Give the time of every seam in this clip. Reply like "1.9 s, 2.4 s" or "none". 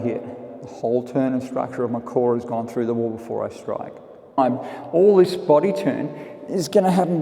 4.4 s